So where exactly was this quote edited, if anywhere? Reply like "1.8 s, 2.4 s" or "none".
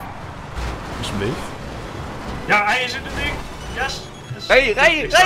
none